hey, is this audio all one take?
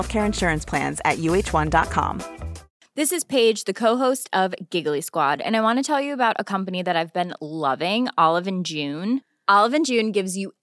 no; 1 cut; at 2.6 s

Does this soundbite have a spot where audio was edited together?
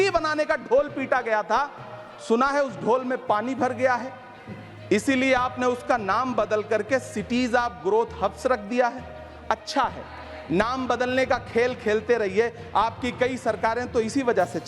no; 0 cuts

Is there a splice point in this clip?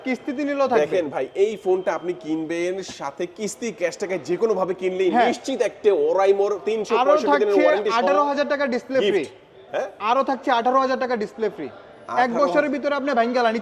no; 0 cuts

